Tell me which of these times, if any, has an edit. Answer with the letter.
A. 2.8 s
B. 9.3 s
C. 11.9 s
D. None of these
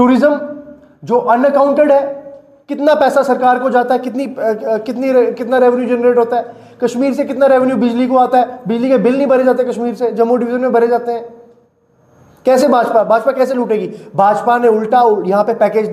D